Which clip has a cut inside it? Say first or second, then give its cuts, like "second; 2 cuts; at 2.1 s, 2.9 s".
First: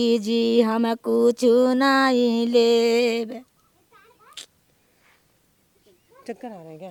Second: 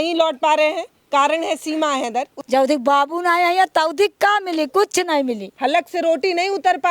second; 2 cuts; at 2.4 s, 5.5 s